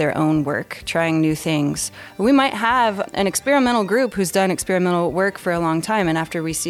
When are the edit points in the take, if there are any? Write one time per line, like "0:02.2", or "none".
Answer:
none

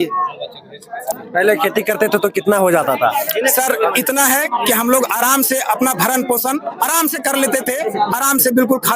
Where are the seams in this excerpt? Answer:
0:01.1

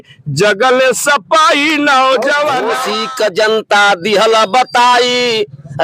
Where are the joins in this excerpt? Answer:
0:02.9

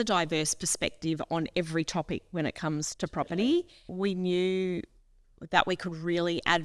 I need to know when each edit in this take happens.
0:03.9

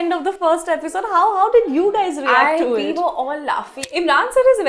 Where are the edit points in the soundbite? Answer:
0:03.8

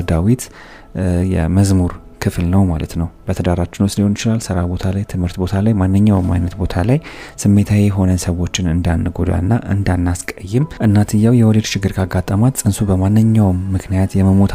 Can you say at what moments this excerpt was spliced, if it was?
0:03.2
0:10.7

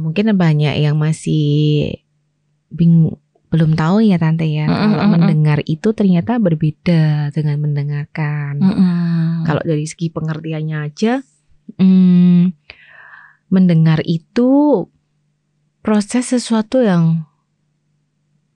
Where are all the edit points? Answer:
none

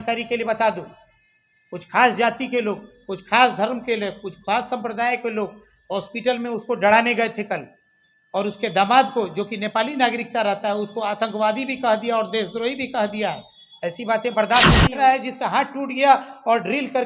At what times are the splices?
0:14.8

